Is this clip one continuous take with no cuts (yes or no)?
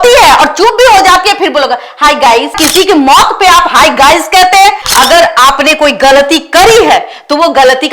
no